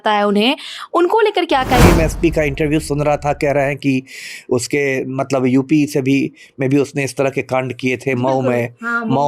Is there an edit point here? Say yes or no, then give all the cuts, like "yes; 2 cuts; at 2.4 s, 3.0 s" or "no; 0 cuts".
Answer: yes; 1 cut; at 1.8 s